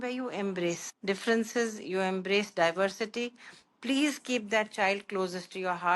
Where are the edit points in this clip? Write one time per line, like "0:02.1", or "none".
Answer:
0:00.9